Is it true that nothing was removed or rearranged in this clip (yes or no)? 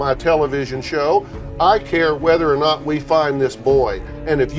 yes